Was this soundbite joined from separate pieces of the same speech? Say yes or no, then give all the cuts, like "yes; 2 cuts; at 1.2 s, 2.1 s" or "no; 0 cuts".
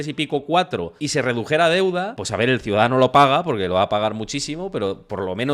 yes; 2 cuts; at 1.0 s, 2.2 s